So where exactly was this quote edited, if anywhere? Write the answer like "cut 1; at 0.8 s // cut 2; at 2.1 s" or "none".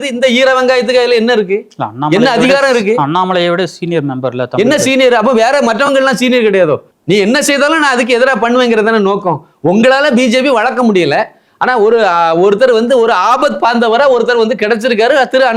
cut 1; at 6.9 s